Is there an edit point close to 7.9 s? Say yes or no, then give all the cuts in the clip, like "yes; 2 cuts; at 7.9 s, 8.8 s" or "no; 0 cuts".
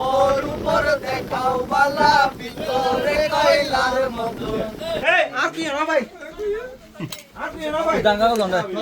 no; 1 cut; at 4.9 s